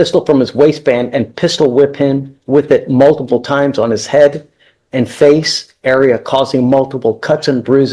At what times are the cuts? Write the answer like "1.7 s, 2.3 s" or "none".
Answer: none